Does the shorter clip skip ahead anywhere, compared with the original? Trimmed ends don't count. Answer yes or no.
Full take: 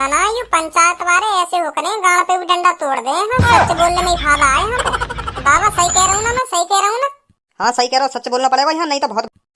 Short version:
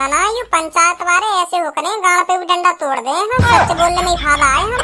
no